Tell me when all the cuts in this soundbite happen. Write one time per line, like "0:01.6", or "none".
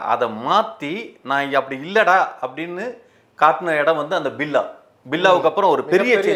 none